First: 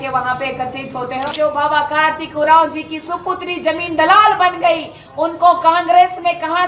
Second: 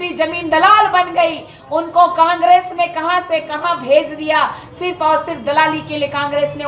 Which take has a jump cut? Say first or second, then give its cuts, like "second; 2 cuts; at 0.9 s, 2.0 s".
first; 1 cut; at 1.3 s